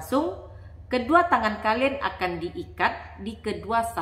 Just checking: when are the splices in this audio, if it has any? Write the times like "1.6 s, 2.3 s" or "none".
none